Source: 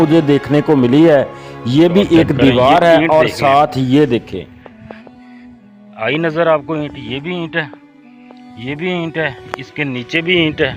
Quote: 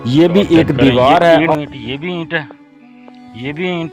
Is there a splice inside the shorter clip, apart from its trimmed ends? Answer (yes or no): yes